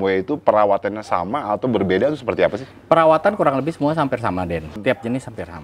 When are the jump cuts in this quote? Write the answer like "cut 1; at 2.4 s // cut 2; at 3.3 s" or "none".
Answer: cut 1; at 2.7 s // cut 2; at 4.7 s